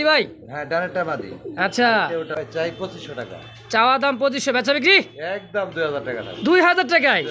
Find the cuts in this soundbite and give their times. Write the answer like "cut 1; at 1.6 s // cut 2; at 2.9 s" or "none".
cut 1; at 2.3 s